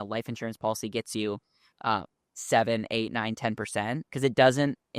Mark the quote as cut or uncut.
uncut